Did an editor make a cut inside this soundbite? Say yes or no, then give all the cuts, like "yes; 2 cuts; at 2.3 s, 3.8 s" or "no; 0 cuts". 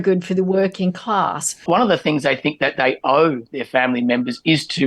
yes; 1 cut; at 1.6 s